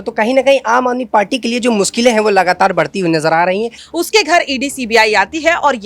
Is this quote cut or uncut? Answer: cut